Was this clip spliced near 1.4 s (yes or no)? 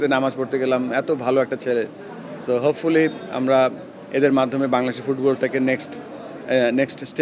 no